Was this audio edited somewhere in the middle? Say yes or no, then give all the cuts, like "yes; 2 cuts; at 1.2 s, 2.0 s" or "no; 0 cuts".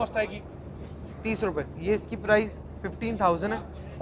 yes; 1 cut; at 1.7 s